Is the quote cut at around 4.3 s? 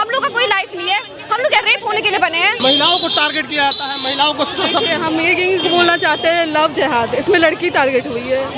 no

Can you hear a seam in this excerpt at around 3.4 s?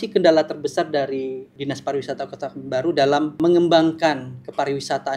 yes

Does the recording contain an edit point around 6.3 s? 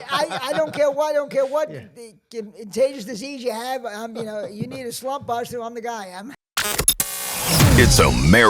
yes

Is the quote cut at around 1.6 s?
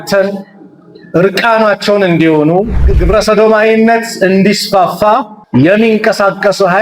no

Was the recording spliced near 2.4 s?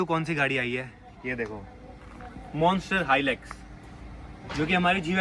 no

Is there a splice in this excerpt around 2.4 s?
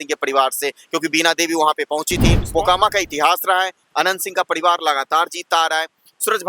yes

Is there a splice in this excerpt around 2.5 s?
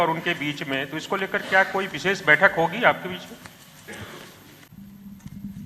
no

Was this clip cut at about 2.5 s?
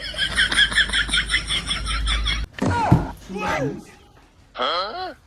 yes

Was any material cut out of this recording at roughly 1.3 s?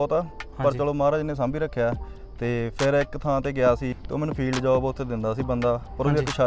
no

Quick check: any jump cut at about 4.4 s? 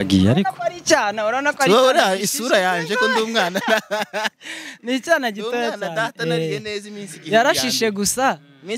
no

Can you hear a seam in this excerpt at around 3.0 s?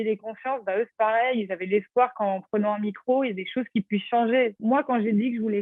no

